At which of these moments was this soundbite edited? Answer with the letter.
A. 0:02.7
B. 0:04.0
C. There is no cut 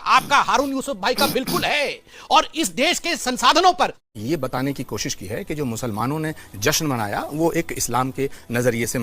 B